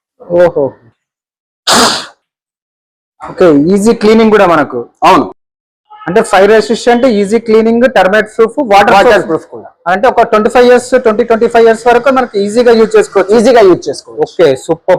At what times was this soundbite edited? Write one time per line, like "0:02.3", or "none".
none

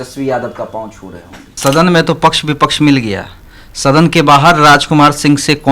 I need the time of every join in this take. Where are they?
0:01.5

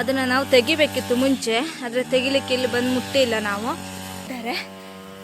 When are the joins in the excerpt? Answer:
0:04.3

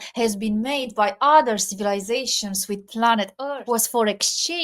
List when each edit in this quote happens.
0:03.5

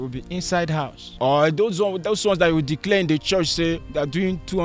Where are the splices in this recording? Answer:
0:01.0

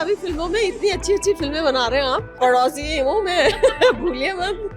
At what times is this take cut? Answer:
0:02.4

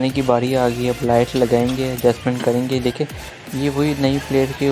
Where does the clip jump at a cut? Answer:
none

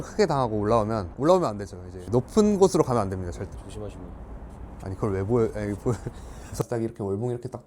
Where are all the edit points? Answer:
0:06.6

